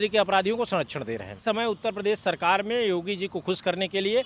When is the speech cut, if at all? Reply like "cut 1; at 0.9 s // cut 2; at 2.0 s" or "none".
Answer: cut 1; at 1.4 s